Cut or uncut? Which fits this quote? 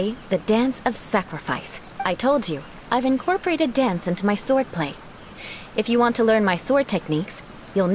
cut